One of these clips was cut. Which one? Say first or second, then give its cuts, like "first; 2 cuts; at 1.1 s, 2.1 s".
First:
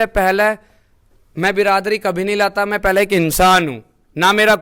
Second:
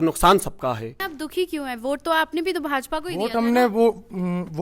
second; 1 cut; at 1.0 s